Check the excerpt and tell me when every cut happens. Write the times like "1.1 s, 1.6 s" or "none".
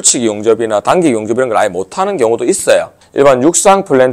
3.0 s